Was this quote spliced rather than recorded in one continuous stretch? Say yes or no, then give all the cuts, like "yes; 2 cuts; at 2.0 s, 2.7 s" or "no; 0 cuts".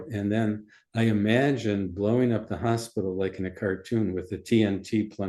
no; 0 cuts